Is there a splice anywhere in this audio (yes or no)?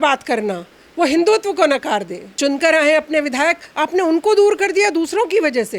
yes